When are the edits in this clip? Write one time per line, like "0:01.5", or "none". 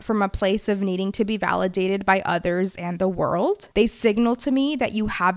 0:03.6